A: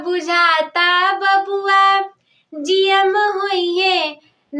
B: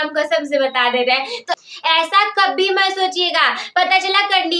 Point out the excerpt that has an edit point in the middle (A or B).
B